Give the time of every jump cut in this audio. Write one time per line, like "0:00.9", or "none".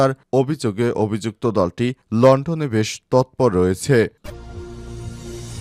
0:04.2

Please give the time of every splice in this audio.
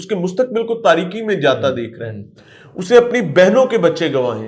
none

